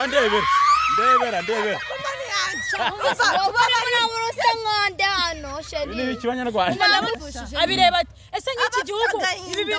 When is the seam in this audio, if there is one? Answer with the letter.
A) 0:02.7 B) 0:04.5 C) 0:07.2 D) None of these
C